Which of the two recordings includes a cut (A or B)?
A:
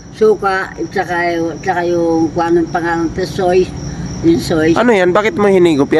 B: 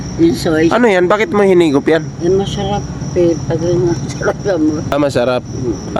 B